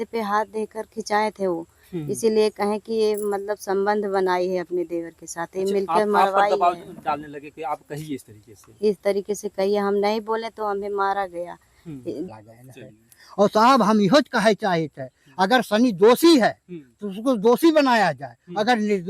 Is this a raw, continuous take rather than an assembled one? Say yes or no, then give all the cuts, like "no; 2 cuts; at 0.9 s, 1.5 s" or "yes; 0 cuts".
no; 1 cut; at 12.3 s